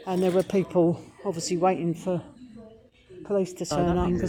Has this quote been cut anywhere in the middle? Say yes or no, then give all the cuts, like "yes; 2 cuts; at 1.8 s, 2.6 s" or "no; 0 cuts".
no; 0 cuts